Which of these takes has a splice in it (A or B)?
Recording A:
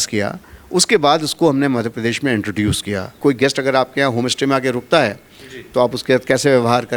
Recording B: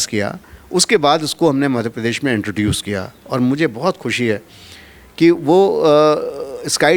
A